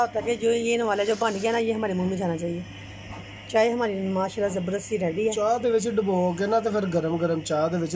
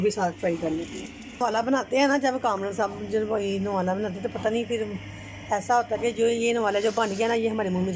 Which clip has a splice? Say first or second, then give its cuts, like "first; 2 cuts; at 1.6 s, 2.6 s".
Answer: second; 1 cut; at 1.4 s